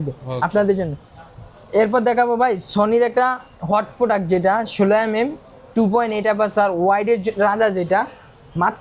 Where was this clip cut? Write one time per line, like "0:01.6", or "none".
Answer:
none